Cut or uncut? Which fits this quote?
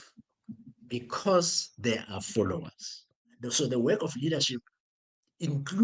cut